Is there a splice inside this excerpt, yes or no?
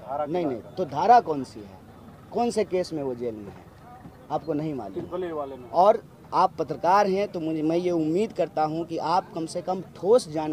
yes